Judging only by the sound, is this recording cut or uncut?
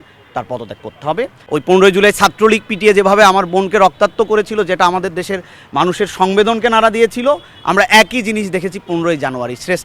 cut